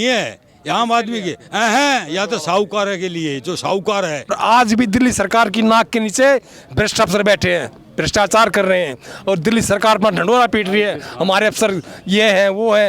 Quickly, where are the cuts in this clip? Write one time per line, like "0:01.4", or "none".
0:04.4

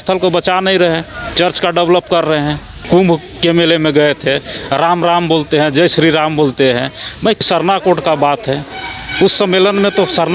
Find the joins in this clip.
0:02.8
0:07.4

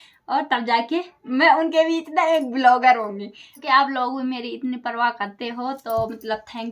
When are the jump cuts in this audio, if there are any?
0:03.6

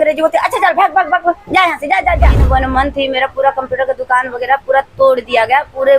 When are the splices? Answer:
0:02.4

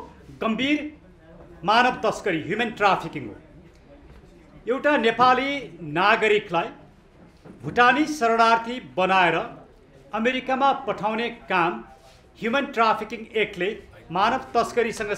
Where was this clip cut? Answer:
none

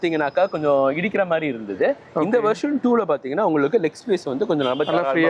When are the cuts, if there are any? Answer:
none

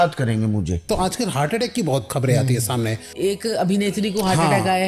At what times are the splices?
0:00.9
0:02.1
0:03.1

